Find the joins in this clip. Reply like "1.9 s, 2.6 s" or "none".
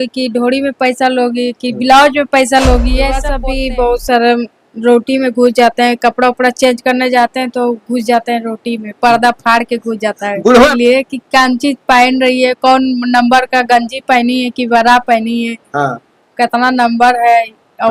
3.4 s, 10.7 s